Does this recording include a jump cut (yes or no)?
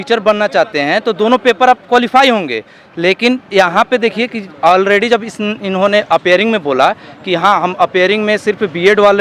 no